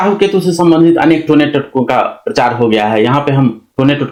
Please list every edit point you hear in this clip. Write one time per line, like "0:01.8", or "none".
none

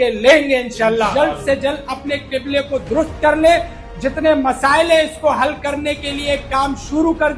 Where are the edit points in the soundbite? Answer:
0:01.1

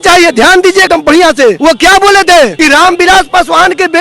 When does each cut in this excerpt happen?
0:01.1
0:02.5

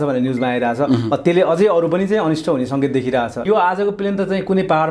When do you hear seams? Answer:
0:03.4

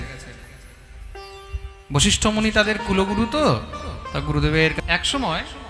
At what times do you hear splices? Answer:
0:04.7

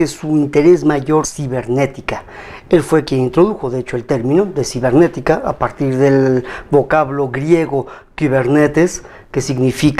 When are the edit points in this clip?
none

